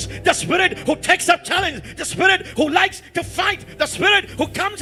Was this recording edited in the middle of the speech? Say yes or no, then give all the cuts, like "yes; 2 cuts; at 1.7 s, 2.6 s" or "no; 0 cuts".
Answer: no; 0 cuts